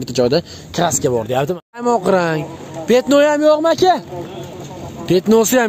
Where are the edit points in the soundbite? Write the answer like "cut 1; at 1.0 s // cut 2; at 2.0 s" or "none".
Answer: cut 1; at 1.8 s